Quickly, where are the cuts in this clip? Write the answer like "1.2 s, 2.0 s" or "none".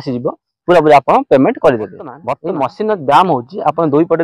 2.3 s